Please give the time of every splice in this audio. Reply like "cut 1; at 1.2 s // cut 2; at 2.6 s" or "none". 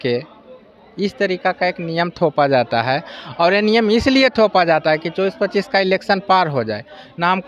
none